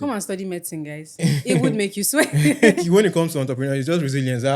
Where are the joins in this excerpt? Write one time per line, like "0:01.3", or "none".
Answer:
0:02.7